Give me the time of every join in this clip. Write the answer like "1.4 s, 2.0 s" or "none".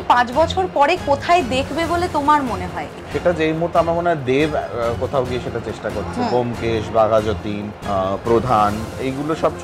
2.8 s